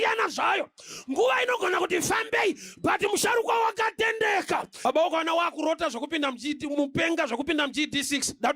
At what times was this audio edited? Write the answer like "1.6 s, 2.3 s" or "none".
4.8 s